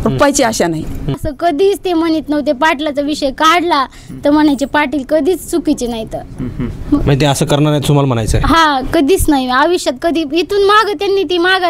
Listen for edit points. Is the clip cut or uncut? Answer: cut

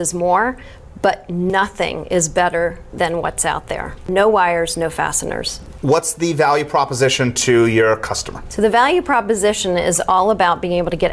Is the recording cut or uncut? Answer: uncut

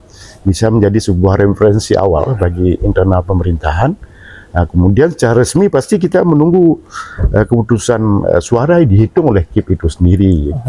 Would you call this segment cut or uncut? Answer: uncut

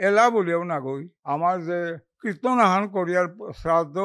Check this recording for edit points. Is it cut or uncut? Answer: cut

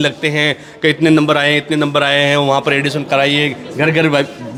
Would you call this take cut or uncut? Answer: uncut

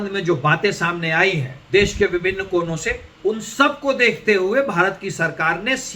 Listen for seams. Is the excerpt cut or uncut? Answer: cut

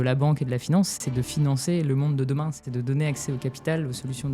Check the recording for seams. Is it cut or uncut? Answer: cut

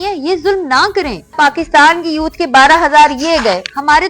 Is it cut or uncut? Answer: cut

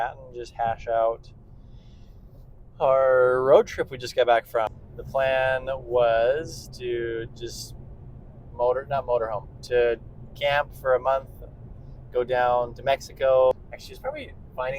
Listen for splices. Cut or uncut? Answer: cut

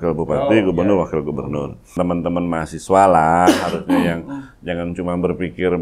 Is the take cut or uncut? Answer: cut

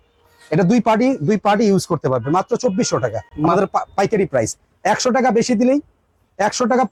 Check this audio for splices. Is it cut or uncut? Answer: uncut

